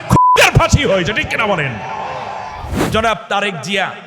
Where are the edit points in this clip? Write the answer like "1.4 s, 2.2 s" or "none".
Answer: 2.7 s